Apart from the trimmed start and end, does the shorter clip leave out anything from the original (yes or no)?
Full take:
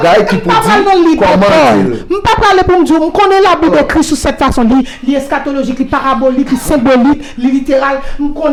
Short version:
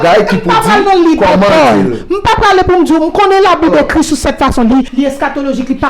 yes